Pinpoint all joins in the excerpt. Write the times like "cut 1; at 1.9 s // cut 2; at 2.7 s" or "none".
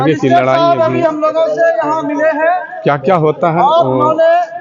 none